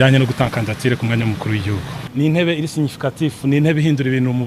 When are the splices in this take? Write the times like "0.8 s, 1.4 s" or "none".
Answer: 2.0 s